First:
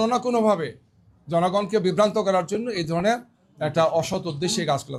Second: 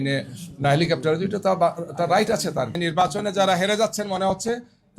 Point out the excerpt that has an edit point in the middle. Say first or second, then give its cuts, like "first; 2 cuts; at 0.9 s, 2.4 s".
second; 1 cut; at 2.8 s